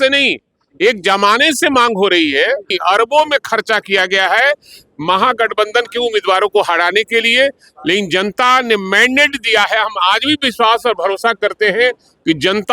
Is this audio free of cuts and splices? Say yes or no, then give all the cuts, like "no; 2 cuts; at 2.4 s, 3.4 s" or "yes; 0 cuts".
no; 1 cut; at 2.7 s